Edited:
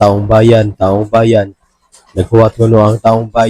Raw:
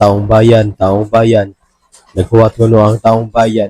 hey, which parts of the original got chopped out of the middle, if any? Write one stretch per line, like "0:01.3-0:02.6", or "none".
none